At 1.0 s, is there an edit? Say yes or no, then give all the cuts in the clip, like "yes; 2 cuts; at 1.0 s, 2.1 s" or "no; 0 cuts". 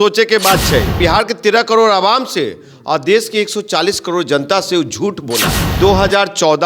yes; 2 cuts; at 1.0 s, 5.6 s